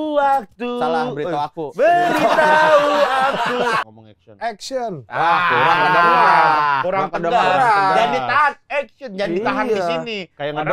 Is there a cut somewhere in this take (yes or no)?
yes